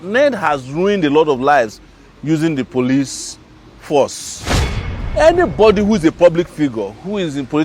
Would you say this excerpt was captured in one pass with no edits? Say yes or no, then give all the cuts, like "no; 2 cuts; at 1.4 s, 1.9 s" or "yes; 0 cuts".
no; 1 cut; at 4.8 s